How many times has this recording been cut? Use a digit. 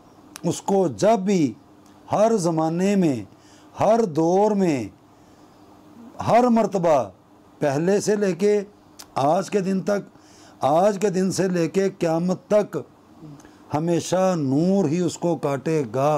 0